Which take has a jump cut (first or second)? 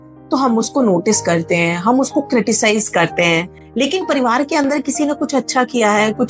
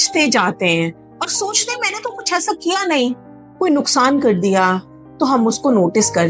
second